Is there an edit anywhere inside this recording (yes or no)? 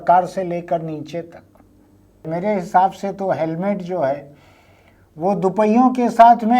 yes